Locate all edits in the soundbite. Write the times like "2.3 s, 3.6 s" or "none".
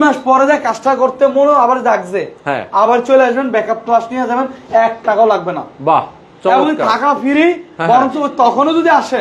none